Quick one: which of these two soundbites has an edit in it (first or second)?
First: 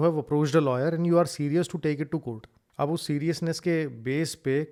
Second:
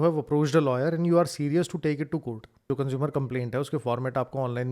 second